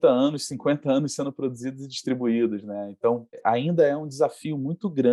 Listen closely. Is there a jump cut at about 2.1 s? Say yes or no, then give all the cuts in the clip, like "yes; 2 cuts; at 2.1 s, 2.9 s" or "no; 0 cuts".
no; 0 cuts